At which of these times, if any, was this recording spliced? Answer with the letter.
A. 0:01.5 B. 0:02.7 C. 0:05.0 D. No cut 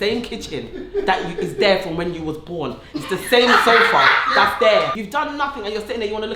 C